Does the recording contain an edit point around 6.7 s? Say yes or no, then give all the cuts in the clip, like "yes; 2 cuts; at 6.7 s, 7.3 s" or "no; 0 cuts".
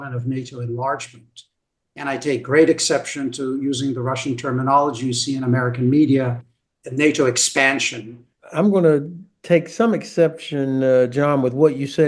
no; 1 cut; at 8.4 s